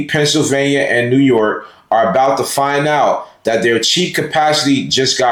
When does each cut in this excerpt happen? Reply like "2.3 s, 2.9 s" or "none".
none